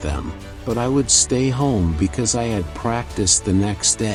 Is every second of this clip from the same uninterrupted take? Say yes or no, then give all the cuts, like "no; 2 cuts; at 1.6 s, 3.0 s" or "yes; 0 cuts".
yes; 0 cuts